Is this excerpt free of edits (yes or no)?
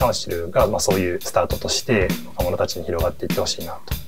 no